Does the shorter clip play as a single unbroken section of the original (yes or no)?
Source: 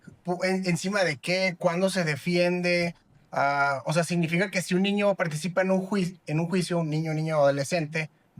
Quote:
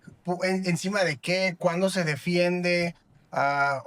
yes